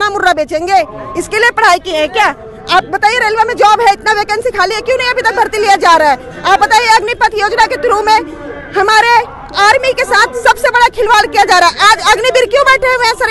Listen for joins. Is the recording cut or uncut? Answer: uncut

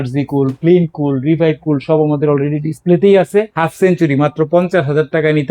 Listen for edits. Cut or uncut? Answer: cut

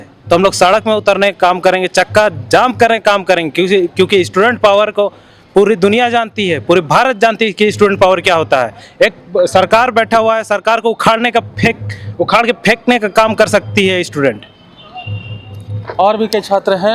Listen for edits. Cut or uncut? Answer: uncut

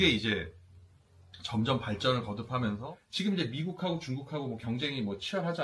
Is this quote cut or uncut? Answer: cut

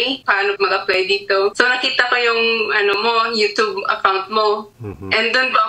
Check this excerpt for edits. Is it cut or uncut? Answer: cut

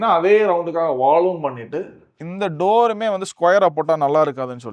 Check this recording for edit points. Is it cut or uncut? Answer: cut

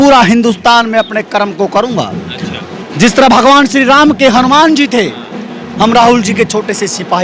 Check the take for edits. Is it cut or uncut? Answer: uncut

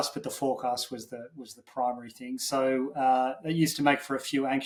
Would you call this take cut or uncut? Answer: uncut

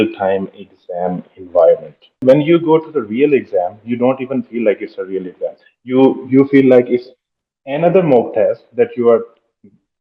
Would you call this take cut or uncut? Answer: cut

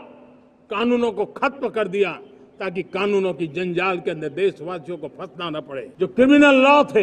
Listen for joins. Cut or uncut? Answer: cut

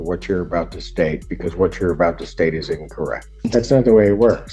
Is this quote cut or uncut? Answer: cut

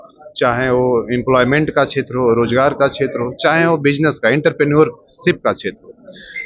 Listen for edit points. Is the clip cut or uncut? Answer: uncut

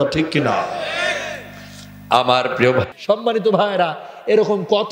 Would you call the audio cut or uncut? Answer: cut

